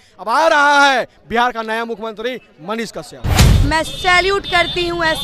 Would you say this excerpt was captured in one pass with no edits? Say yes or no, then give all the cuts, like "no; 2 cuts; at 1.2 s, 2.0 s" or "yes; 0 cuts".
no; 1 cut; at 3.5 s